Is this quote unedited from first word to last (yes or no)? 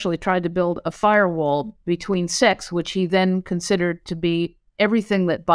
no